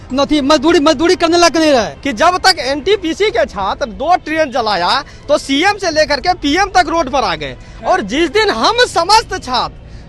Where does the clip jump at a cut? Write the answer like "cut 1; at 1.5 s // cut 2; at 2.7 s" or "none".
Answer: cut 1; at 2.0 s

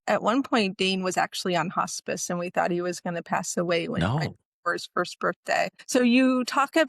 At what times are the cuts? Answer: cut 1; at 5.8 s

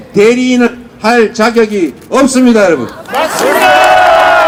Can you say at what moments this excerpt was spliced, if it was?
none

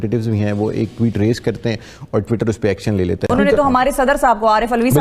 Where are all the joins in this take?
cut 1; at 3.2 s

